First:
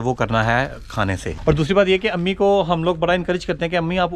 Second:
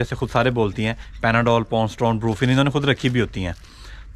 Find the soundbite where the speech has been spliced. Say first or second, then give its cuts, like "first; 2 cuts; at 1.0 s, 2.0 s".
first; 1 cut; at 1.3 s